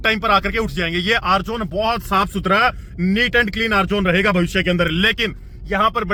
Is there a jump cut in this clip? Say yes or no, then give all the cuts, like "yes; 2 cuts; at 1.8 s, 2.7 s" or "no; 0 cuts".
no; 0 cuts